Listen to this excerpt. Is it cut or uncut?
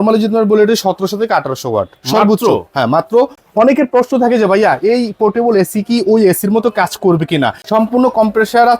cut